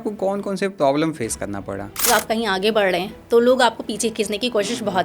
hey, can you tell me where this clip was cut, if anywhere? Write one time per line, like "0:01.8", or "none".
0:02.1

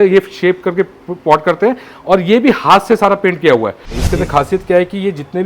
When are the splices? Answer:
0:04.0

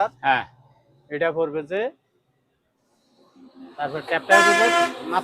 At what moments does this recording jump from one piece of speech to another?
0:02.9

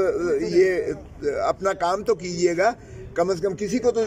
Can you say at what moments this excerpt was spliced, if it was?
none

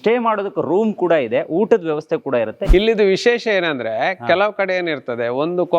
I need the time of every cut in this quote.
0:02.6

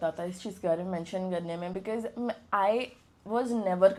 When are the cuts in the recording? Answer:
none

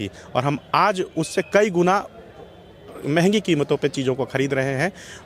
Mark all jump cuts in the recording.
none

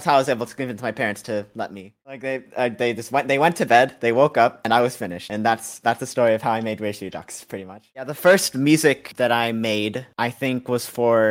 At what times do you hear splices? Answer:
0:02.0
0:08.0

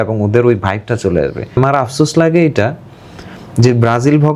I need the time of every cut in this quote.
0:01.5

